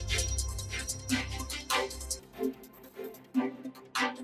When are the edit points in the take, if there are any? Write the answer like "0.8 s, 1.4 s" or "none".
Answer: 2.3 s